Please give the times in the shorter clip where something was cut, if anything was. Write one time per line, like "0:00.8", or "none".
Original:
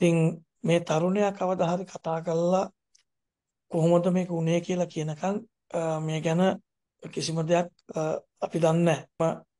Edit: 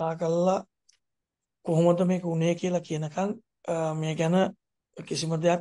none